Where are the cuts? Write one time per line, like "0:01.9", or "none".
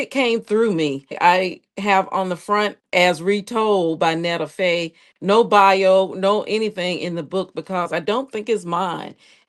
0:01.1

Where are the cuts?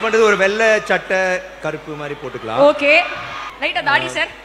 none

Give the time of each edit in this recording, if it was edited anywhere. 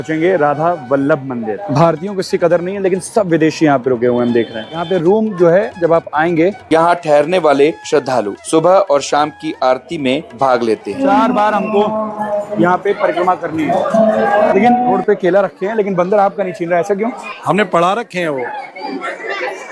0:01.6
0:04.9
0:06.6
0:11.0
0:15.0

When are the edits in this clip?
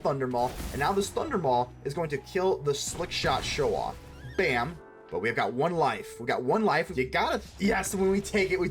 0:04.8
0:06.9

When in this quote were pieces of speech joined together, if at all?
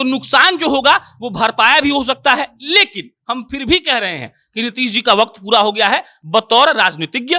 none

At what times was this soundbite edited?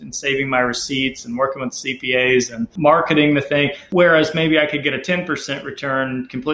0:02.7
0:03.8

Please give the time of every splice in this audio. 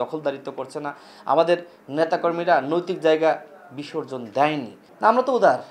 0:04.8

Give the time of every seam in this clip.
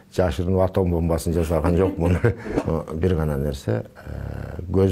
0:02.5

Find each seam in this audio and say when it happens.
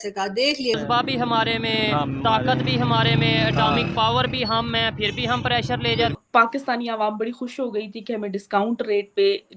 0:00.7
0:06.2

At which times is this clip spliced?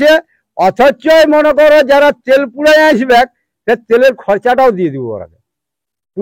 none

